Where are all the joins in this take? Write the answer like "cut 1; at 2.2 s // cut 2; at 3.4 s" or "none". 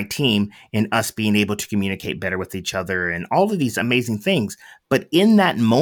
none